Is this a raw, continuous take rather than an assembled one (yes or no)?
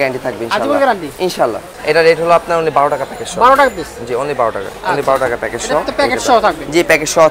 no